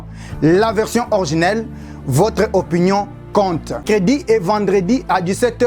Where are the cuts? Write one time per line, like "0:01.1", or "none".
0:03.8